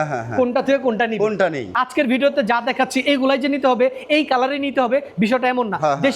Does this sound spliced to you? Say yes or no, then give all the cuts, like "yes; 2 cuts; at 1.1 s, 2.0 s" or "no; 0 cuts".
yes; 1 cut; at 1.7 s